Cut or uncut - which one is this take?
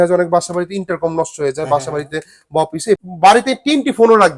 cut